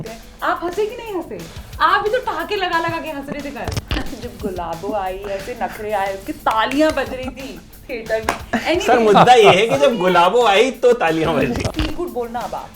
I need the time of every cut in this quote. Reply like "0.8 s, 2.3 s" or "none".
3.8 s, 11.7 s